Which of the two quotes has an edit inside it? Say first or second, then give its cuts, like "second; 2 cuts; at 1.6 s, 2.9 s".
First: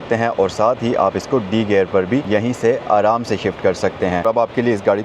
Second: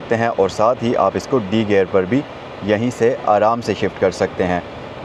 first; 2 cuts; at 2.2 s, 4.2 s